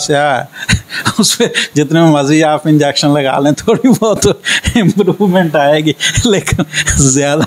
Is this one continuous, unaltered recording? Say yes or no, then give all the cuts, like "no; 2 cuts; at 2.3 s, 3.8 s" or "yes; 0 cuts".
yes; 0 cuts